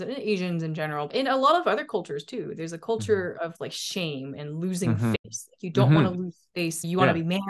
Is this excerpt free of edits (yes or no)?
no